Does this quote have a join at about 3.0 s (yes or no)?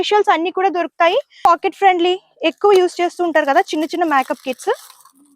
no